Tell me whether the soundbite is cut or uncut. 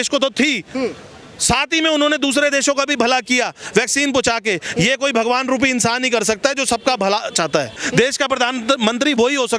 cut